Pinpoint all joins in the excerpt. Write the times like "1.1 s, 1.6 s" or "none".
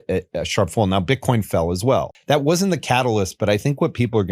2.1 s